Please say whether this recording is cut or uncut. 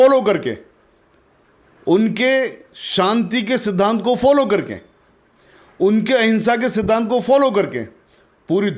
uncut